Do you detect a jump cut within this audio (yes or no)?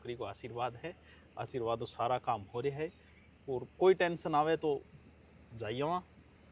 no